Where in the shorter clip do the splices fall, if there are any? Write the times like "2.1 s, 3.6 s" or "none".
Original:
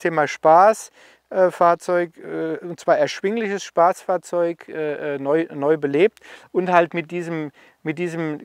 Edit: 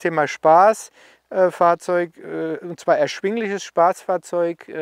none